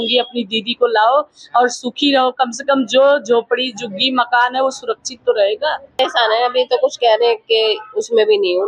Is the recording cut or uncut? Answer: cut